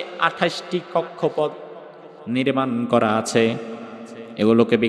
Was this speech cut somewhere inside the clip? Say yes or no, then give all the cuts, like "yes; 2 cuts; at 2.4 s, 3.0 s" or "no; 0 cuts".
no; 0 cuts